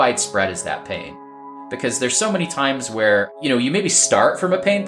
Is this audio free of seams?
no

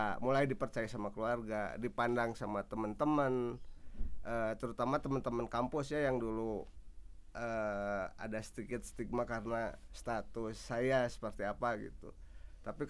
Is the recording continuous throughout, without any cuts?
yes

